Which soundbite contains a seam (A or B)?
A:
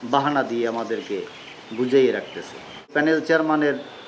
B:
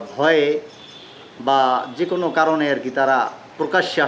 A